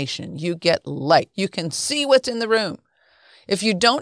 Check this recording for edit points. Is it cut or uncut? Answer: cut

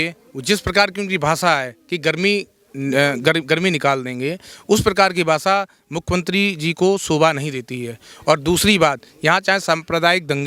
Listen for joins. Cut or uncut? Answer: uncut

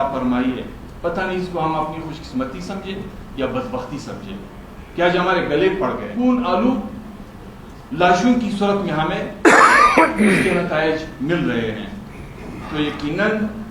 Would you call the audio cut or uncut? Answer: cut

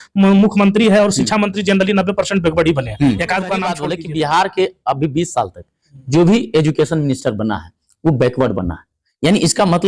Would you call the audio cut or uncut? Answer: cut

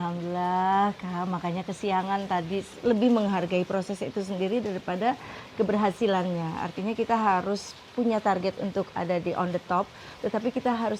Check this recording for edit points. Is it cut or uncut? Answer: cut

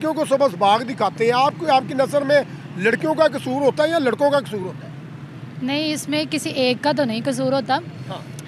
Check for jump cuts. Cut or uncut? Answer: uncut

